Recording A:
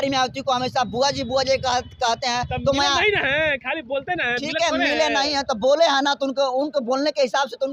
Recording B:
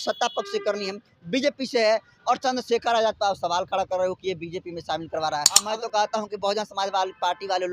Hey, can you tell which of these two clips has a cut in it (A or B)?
B